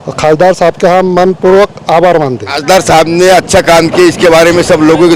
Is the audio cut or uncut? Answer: cut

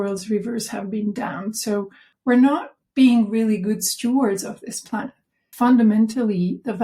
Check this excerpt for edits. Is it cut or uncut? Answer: cut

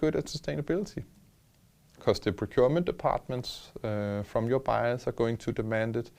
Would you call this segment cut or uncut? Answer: uncut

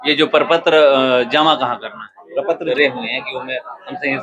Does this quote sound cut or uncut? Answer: cut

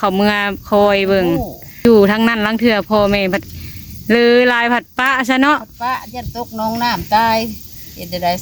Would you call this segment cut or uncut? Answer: cut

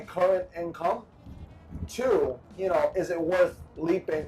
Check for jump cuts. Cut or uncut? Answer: cut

